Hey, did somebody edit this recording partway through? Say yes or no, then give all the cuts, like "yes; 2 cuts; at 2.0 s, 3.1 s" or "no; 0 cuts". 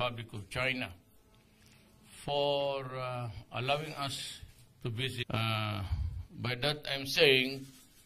no; 0 cuts